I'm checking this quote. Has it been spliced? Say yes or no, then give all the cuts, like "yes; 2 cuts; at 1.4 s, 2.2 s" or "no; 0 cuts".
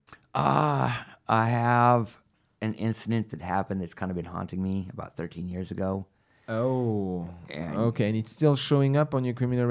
no; 0 cuts